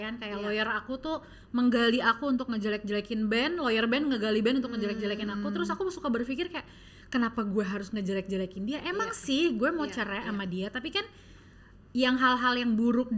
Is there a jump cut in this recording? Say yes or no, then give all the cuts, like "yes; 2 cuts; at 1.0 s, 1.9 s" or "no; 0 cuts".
no; 0 cuts